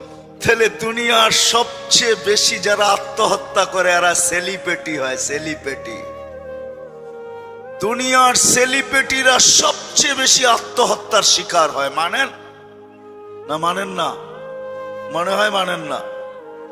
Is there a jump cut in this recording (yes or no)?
no